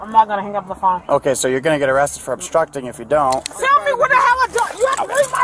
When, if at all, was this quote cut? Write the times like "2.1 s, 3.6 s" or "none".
3.5 s